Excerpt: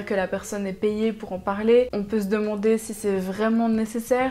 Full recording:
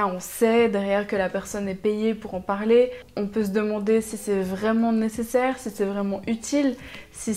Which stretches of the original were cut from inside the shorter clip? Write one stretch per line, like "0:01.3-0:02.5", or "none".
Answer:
0:03.0-0:03.2